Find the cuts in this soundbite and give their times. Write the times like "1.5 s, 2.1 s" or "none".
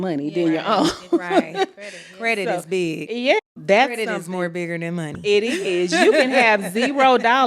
3.4 s